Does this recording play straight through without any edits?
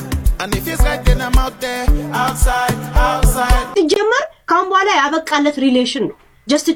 yes; 0 cuts

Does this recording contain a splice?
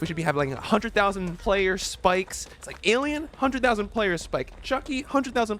yes; 1 cut; at 1.3 s

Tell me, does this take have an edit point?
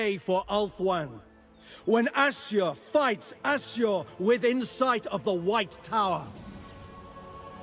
yes; 1 cut; at 6.3 s

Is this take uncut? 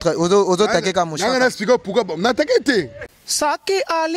no; 1 cut; at 3.2 s

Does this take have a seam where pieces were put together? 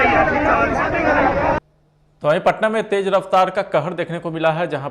yes; 1 cut; at 1.8 s

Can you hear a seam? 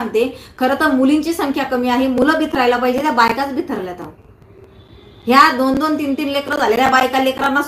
no; 0 cuts

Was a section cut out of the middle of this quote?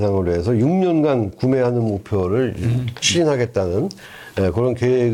no; 0 cuts

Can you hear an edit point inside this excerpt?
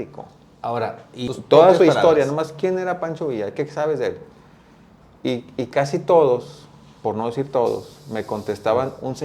yes; 1 cut; at 1.1 s

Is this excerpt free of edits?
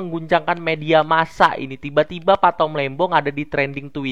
yes; 0 cuts

